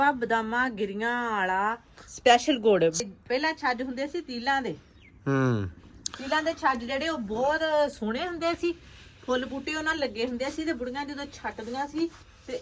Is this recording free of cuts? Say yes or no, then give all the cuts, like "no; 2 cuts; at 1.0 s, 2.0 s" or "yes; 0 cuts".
no; 1 cut; at 3.0 s